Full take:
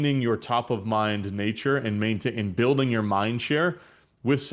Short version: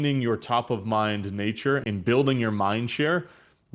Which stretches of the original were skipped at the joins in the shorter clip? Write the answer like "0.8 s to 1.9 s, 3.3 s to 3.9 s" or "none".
1.8 s to 2.4 s